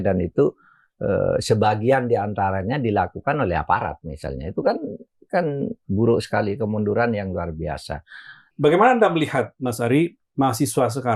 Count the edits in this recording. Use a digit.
1